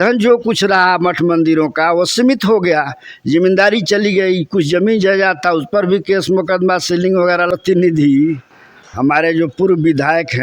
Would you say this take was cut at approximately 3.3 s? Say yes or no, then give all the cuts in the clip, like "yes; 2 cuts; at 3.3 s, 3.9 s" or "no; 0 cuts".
no; 1 cut; at 7.5 s